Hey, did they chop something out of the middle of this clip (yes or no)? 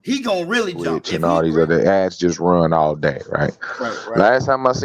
yes